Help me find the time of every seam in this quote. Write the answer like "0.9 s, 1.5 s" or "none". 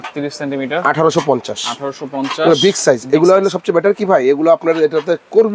none